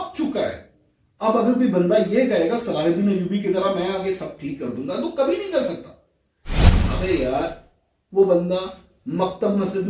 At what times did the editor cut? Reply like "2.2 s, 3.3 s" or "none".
6.7 s